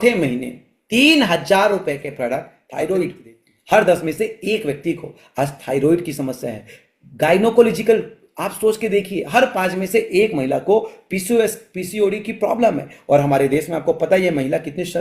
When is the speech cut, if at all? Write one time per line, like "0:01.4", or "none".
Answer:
0:02.6